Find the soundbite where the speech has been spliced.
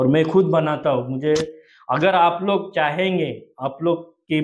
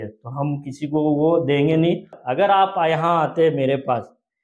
second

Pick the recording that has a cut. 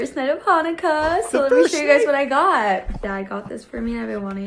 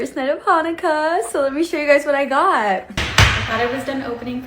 second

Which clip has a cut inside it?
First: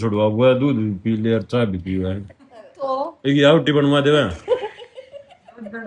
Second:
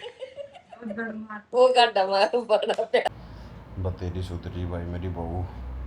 second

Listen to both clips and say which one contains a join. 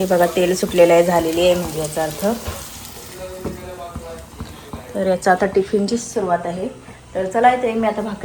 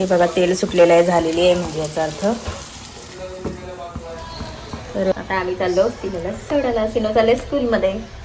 second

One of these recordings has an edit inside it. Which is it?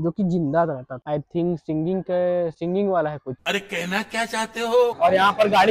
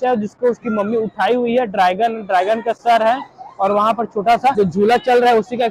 first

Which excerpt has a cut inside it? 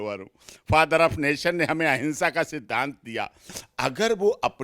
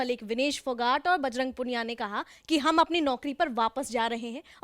first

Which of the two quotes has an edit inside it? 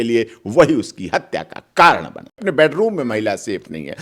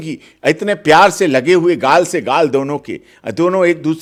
first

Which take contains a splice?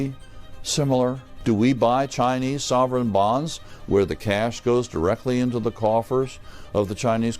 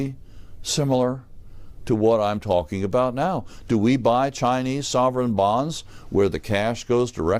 first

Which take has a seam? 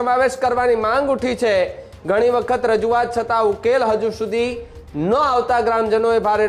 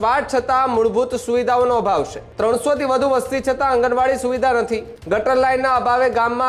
second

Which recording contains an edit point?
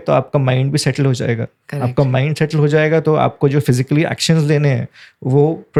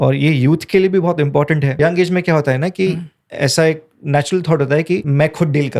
second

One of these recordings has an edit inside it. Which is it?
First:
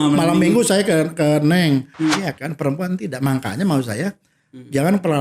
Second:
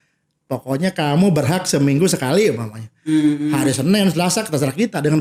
first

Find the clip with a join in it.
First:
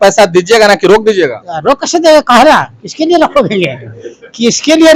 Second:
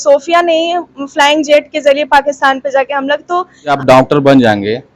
second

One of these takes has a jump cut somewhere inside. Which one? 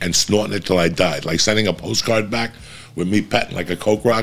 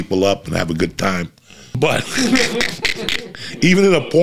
second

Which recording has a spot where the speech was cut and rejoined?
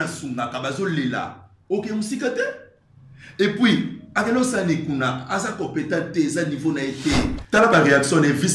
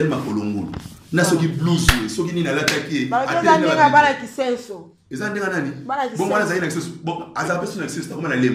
first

